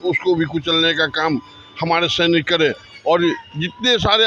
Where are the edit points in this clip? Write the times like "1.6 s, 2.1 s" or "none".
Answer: none